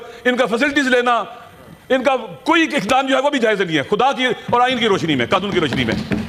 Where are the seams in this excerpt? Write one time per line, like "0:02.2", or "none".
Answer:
none